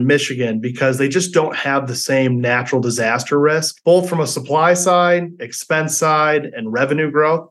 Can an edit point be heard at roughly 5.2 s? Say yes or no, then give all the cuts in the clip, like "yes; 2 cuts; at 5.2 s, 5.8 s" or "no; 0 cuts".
no; 1 cut; at 3.7 s